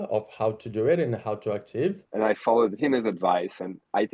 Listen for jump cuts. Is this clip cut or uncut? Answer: cut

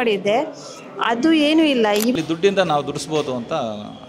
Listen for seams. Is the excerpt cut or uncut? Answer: cut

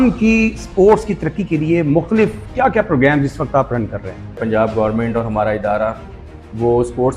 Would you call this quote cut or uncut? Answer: cut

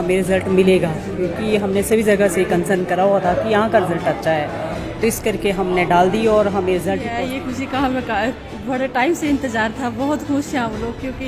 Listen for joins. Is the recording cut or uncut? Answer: cut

